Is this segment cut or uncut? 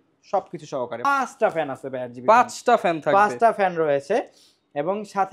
cut